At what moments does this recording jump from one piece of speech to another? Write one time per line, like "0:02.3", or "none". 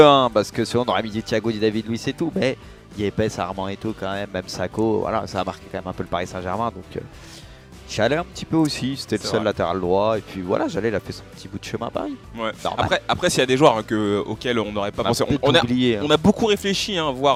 none